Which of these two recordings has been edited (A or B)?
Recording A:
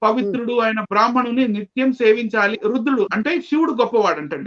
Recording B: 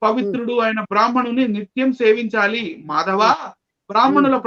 A